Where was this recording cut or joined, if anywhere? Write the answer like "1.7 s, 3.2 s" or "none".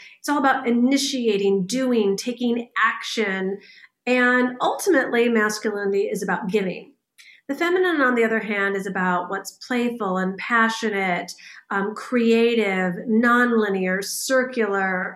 none

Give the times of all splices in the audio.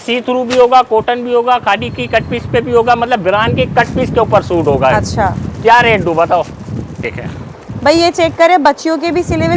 7.1 s

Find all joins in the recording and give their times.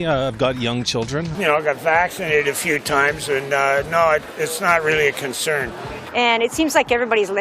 1.3 s, 6.1 s

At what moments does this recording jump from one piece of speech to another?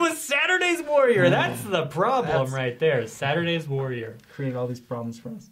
4.2 s

